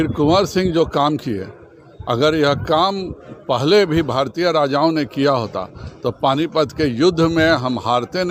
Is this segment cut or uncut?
uncut